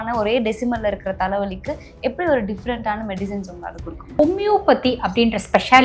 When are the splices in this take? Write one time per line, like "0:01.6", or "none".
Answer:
0:04.1